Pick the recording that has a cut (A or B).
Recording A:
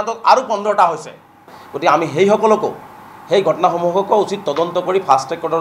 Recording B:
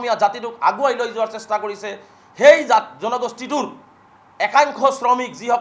A